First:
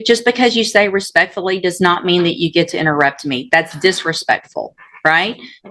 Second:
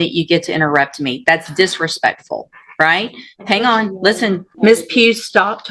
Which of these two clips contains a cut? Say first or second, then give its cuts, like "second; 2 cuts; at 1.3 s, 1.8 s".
second; 1 cut; at 4.5 s